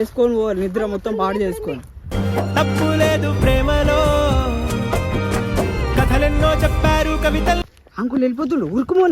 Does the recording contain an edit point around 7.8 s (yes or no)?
yes